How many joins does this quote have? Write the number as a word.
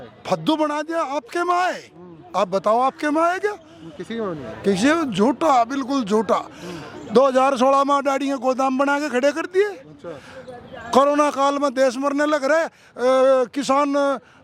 zero